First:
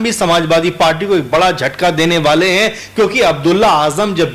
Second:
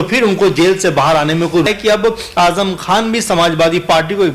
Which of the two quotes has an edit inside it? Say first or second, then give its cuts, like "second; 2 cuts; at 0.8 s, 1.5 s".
second; 1 cut; at 1.7 s